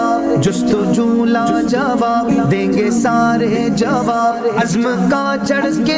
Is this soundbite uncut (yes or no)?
yes